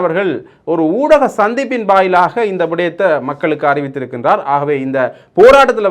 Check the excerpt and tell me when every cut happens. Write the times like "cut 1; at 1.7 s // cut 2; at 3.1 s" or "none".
none